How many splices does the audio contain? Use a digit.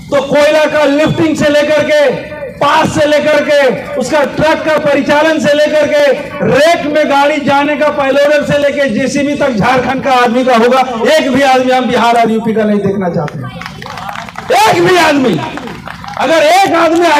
0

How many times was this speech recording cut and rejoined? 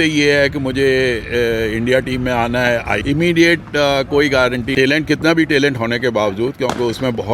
2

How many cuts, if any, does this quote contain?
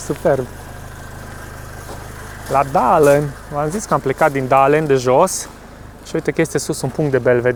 0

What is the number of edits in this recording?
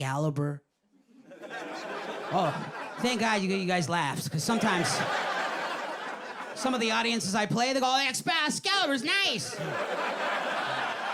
0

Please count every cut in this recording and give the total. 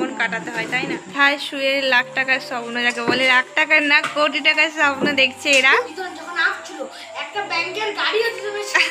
2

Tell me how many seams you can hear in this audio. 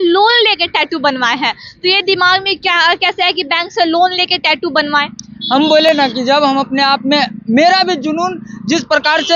0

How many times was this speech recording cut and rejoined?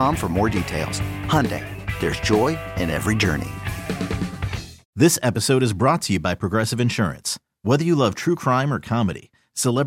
1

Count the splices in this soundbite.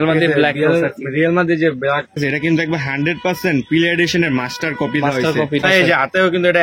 2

